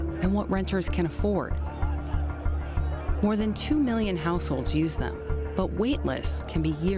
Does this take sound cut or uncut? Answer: uncut